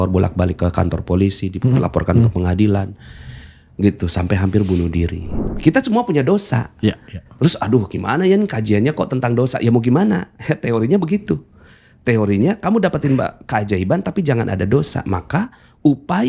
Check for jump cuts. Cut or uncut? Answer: cut